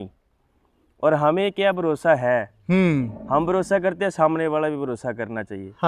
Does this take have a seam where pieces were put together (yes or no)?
no